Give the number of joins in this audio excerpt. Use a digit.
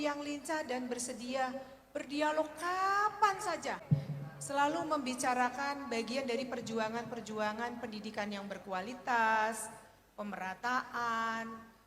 1